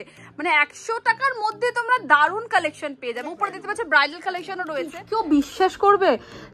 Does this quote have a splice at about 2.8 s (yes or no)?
no